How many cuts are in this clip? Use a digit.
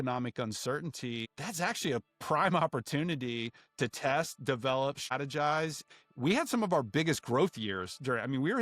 3